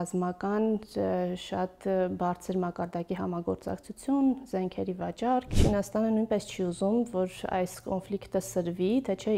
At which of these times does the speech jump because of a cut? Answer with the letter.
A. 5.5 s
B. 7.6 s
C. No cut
A